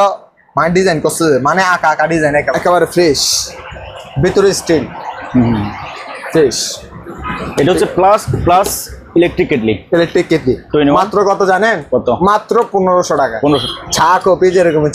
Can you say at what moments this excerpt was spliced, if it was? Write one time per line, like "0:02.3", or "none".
0:02.5
0:13.6